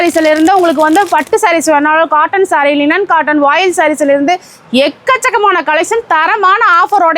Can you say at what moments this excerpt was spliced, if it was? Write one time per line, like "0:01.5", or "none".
none